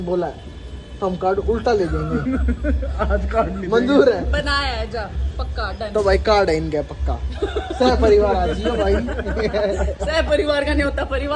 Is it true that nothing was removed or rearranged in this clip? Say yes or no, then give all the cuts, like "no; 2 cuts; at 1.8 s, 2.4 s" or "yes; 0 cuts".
yes; 0 cuts